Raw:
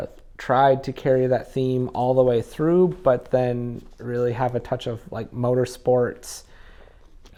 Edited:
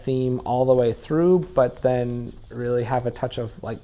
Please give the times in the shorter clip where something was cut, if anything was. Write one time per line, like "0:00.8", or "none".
none